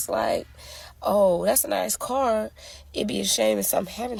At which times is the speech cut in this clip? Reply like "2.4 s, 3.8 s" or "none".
none

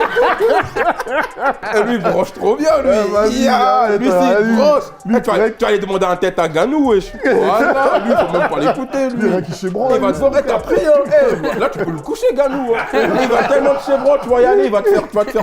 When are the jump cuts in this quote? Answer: 1.6 s

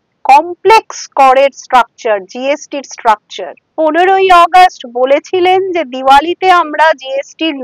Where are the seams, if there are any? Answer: 3.6 s

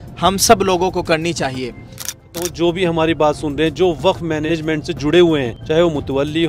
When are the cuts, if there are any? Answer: 2.3 s, 4.5 s, 5.6 s

